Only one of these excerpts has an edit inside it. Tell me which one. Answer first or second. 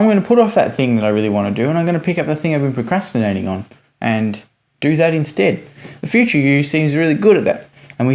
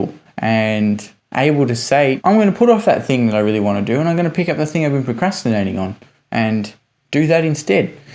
second